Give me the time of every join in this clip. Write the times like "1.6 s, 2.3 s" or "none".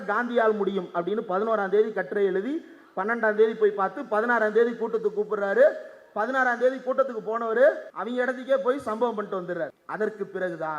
7.9 s, 9.8 s